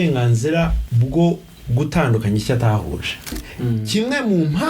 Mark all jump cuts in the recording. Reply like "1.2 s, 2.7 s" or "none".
0.9 s, 3.4 s